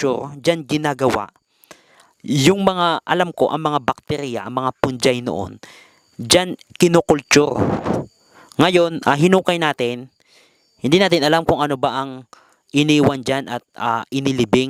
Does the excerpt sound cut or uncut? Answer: uncut